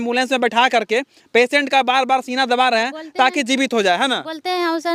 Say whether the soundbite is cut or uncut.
uncut